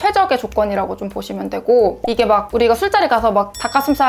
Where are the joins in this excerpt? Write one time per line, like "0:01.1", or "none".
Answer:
0:02.0